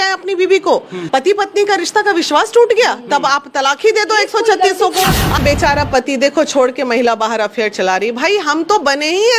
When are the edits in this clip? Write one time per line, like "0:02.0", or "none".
0:01.0
0:05.4